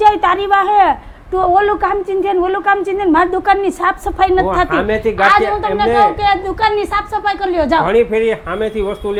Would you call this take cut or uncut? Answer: uncut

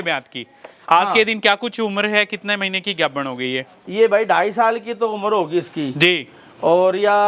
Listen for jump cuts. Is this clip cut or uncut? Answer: uncut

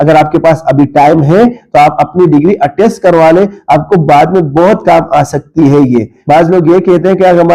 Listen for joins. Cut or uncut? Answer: uncut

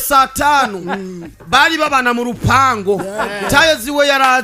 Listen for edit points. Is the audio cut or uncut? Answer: uncut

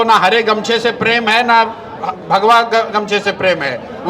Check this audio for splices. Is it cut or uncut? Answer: uncut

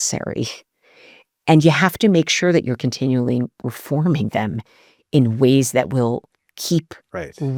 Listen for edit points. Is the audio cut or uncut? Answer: uncut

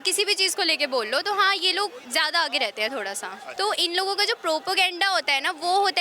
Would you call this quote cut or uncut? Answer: cut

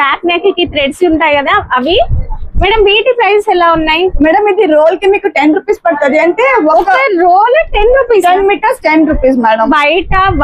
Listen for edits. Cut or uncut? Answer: uncut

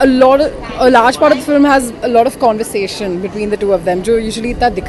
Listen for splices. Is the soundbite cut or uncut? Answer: uncut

